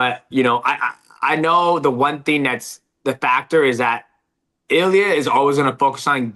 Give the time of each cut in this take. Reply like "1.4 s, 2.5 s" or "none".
none